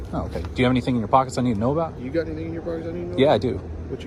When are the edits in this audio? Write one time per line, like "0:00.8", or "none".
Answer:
none